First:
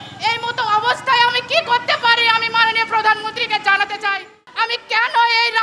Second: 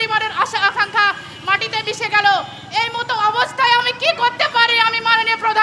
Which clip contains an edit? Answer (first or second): first